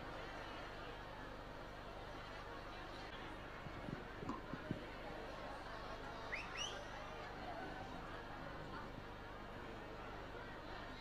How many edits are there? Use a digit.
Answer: 1